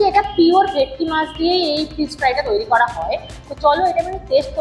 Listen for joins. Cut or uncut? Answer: uncut